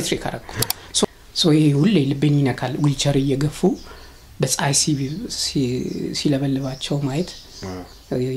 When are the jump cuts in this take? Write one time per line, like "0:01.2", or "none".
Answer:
0:01.0